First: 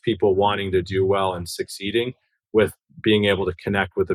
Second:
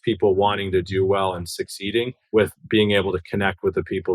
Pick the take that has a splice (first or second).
second